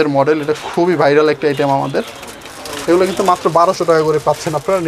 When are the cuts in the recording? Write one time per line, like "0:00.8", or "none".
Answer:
none